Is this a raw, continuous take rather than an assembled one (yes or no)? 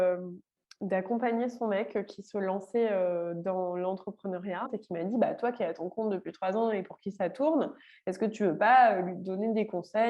no